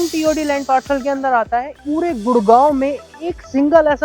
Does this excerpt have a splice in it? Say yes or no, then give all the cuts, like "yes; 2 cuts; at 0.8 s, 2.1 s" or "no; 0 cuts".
yes; 1 cut; at 1.8 s